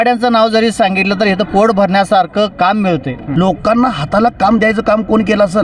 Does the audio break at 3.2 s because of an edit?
yes; 1 cut; at 3.2 s

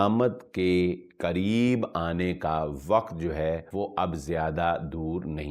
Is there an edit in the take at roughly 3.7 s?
yes; 1 cut; at 3.7 s

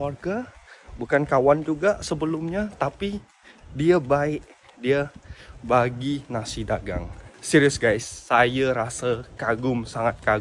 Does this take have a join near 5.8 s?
no; 0 cuts

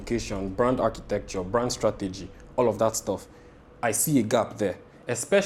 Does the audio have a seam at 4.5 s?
no; 0 cuts

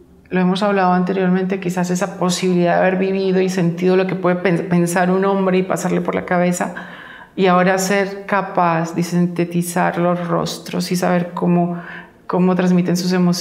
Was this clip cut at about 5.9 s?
yes; 1 cut; at 5.9 s

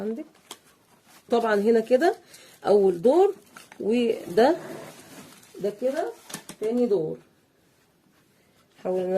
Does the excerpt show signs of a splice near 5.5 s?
no; 1 cut; at 1.3 s

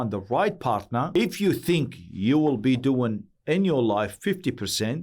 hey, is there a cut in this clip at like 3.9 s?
no; 1 cut; at 1.1 s

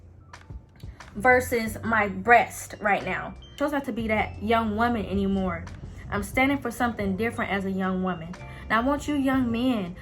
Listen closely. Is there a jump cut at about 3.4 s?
yes; 1 cut; at 3.4 s

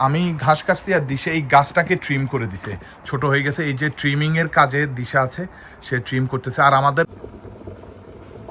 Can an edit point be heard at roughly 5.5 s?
no; 1 cut; at 7.1 s

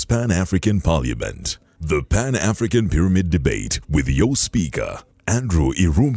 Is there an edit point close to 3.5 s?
no; 0 cuts

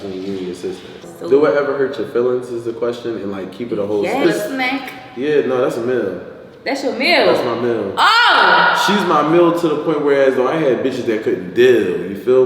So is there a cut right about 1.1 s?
yes; 2 cuts; at 1.1 s, 4.2 s

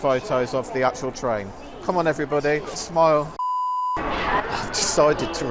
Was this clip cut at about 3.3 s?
yes; 1 cut; at 3.3 s

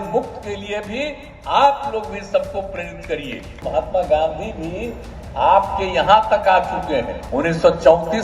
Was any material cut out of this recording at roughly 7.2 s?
yes; 2 cuts; at 3.6 s, 7.2 s

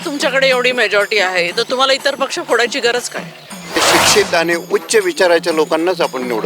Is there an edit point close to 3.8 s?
yes; 1 cut; at 3.8 s

